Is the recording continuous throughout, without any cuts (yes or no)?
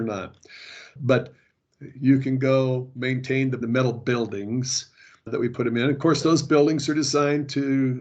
no